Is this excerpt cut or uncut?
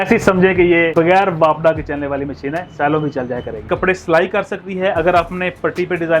cut